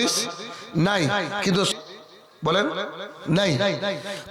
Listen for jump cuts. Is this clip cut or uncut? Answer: cut